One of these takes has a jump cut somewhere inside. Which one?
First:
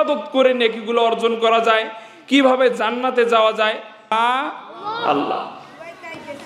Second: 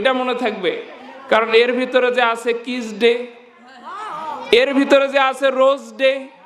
first; 1 cut; at 4.1 s

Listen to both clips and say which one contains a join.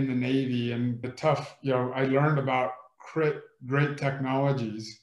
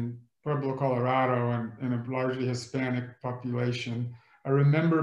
first; 1 cut; at 1.1 s

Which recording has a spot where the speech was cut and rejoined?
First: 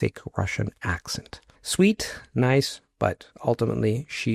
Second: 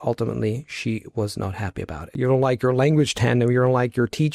second; 1 cut; at 2.1 s

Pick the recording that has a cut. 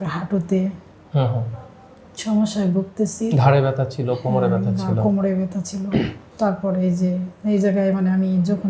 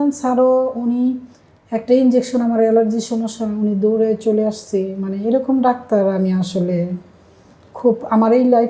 first; 1 cut; at 6.2 s

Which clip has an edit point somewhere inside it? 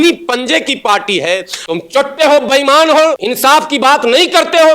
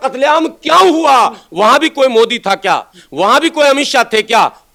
first; 2 cuts; at 1.5 s, 3.3 s

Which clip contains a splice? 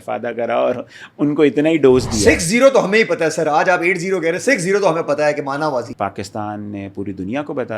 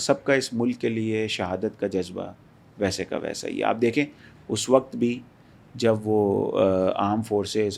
first; 1 cut; at 5.9 s

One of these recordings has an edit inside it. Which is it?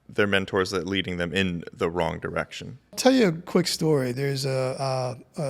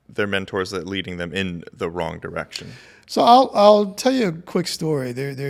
first; 2 cuts; at 2.9 s, 4.1 s

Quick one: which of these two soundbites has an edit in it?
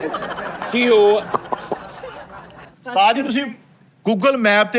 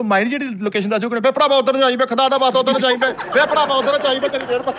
first; 1 cut; at 2.7 s

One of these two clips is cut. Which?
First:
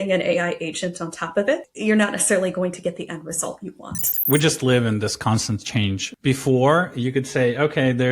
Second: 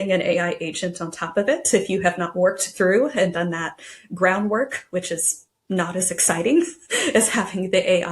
first; 3 cuts; at 1.6 s, 4.1 s, 6.1 s

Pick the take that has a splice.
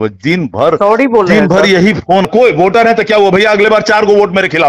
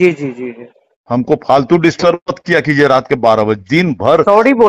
first; 1 cut; at 2.2 s

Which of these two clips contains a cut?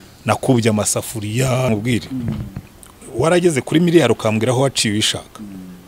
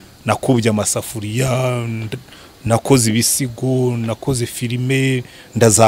first; 1 cut; at 1.7 s

